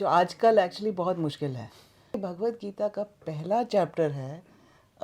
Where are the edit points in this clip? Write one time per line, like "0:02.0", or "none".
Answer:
0:02.2